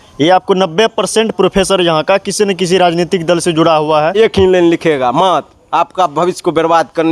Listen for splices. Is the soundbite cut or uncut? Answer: cut